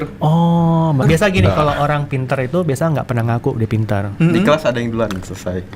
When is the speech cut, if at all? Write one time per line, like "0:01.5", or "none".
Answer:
0:01.0